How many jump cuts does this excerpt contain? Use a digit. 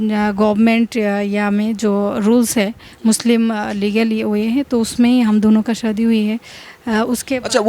0